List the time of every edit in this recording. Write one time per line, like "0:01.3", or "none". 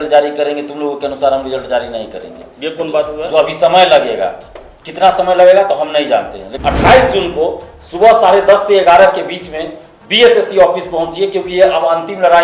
0:06.4